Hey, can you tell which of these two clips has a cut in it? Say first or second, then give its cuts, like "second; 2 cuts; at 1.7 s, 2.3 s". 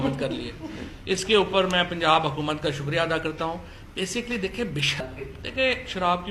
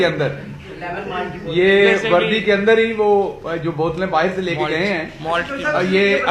first; 1 cut; at 5.0 s